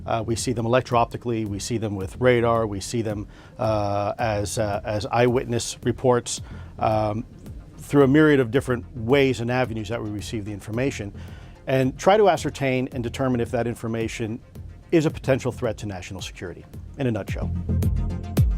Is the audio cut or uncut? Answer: cut